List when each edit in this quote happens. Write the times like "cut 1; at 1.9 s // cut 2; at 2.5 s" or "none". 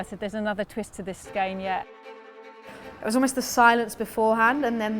cut 1; at 1.2 s // cut 2; at 2.5 s